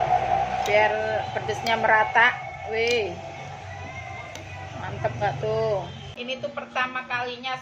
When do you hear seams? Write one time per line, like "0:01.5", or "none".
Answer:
0:06.1